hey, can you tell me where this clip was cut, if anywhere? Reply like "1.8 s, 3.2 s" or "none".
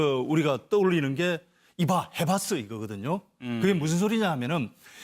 1.1 s

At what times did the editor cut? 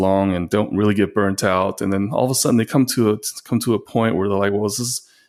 none

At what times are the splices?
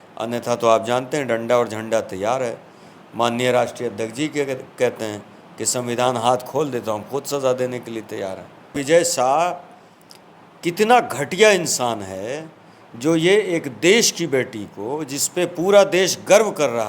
8.7 s

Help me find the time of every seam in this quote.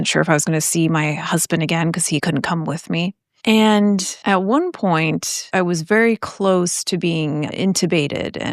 2.2 s, 3.3 s, 4.1 s, 5.4 s

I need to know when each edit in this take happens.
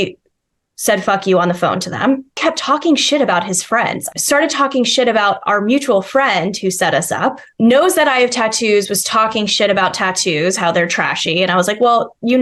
2.4 s, 4.0 s, 7.4 s

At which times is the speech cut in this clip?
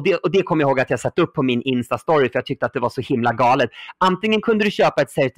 none

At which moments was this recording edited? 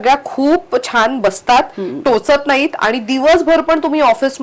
none

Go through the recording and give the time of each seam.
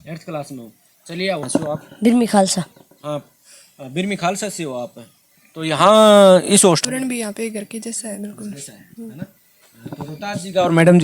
1.5 s, 6.8 s

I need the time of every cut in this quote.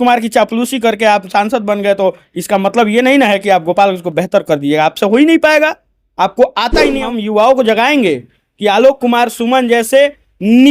7.0 s

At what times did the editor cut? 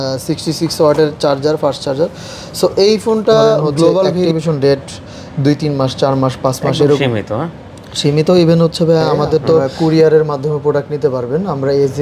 4.3 s, 9.7 s

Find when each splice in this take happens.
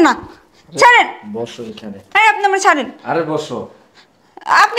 none

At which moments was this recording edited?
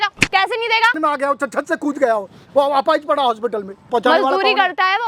1.0 s, 3.8 s

